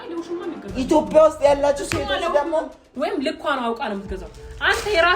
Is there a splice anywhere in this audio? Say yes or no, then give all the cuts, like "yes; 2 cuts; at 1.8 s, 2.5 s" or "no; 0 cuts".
yes; 1 cut; at 2.8 s